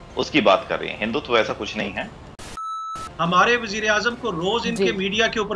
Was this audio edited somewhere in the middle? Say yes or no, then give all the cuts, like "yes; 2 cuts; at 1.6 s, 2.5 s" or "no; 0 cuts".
yes; 1 cut; at 2.7 s